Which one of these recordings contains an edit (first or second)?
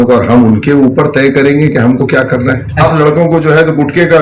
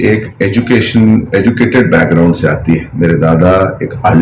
first